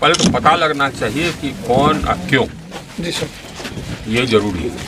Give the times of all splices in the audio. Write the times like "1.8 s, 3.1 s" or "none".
none